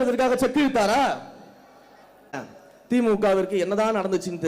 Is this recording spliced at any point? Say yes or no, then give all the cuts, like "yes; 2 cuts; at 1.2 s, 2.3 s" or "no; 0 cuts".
yes; 1 cut; at 2.5 s